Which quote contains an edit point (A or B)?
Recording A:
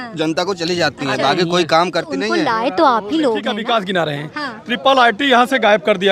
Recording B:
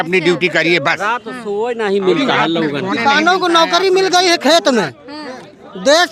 A